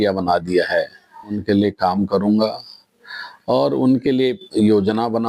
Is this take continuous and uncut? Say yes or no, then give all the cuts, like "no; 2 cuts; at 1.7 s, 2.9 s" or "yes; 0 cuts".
no; 1 cut; at 1.4 s